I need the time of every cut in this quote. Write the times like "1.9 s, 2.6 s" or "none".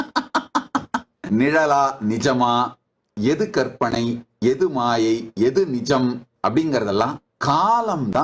1.1 s, 6.3 s, 7.3 s